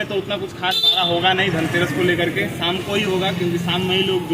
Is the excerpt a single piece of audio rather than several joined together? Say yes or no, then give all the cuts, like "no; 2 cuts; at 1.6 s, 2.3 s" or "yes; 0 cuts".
yes; 0 cuts